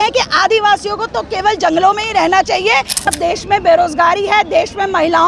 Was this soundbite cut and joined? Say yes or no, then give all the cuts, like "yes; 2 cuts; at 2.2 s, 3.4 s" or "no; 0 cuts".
yes; 1 cut; at 3.1 s